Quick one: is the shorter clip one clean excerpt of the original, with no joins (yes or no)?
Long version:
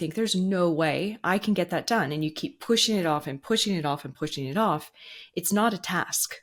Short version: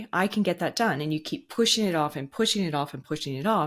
yes